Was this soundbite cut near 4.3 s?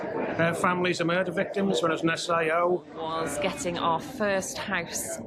no; 1 cut; at 3.0 s

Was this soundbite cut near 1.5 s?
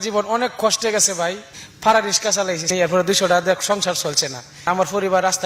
yes; 3 cuts; at 1.5 s, 2.7 s, 4.6 s

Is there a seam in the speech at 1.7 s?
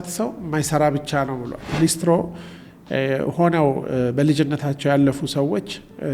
yes; 1 cut; at 1.7 s

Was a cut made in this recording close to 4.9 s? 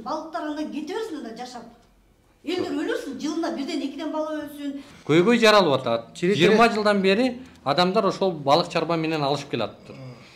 yes; 1 cut; at 4.9 s

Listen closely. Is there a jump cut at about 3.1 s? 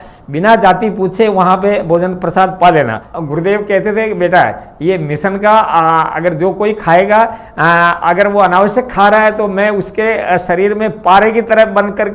yes; 1 cut; at 3.1 s

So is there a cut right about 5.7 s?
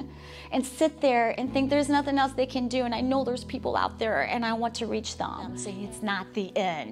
yes; 1 cut; at 5.7 s

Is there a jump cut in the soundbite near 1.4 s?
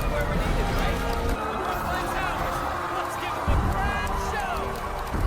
yes; 1 cut; at 1.4 s

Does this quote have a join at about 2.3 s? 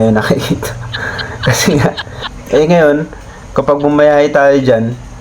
yes; 1 cut; at 2.3 s

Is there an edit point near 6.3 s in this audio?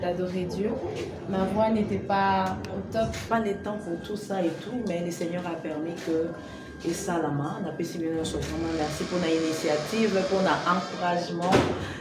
no; 1 cut; at 3.3 s

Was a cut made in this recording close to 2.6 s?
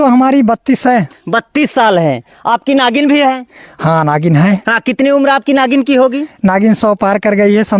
no; 0 cuts

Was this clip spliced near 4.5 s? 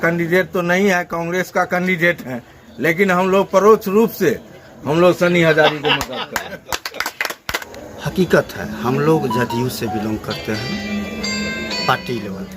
no; 1 cut; at 7.7 s

